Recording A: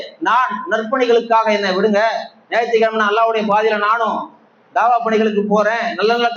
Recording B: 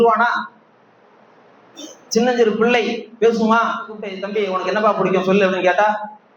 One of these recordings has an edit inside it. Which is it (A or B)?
B